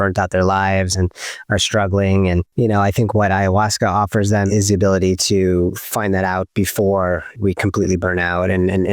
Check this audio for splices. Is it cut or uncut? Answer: cut